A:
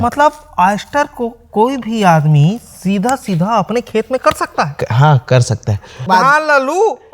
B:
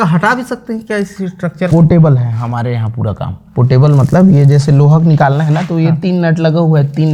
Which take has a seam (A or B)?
A